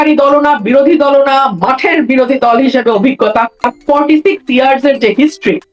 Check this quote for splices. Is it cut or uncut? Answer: cut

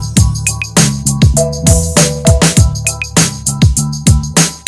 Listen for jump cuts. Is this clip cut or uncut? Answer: uncut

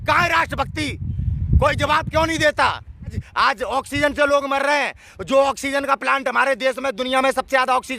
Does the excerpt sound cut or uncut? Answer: cut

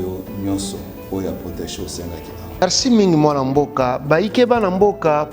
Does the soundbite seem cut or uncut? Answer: cut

